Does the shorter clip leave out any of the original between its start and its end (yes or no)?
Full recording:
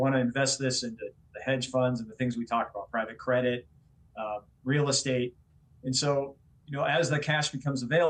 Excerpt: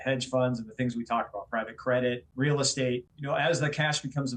yes